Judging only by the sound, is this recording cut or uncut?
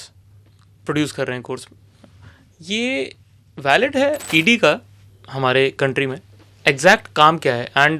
cut